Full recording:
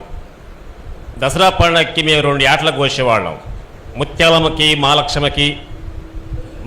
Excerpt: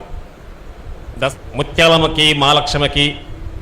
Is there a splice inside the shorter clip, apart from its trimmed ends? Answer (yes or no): yes